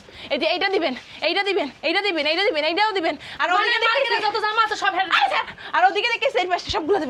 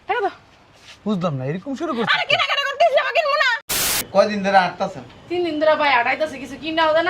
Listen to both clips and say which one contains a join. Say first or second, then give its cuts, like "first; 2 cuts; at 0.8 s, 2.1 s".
second; 1 cut; at 3.7 s